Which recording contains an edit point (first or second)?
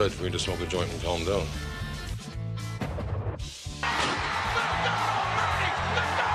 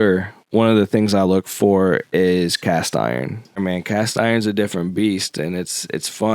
second